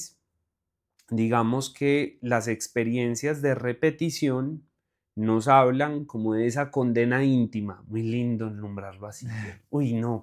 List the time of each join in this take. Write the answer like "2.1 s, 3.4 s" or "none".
none